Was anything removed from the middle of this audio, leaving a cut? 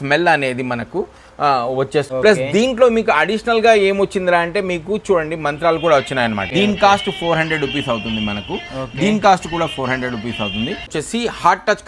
yes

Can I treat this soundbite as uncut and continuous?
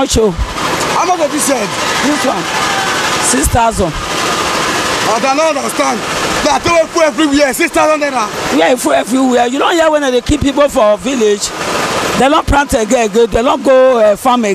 yes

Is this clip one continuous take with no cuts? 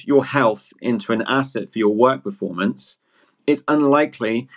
yes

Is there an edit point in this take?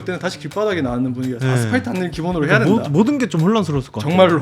no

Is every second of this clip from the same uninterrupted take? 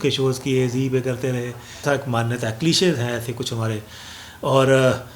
no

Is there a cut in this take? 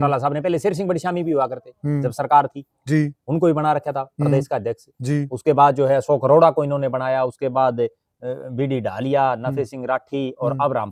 no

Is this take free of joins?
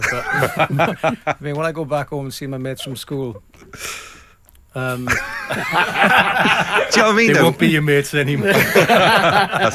yes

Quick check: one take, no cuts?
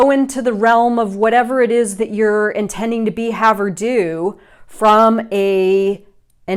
yes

